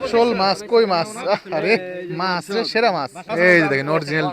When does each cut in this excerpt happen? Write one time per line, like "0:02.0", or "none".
0:03.2